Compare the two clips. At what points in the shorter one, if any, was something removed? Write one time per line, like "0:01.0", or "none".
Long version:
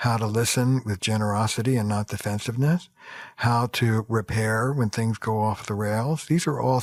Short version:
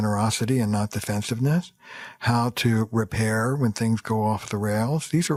none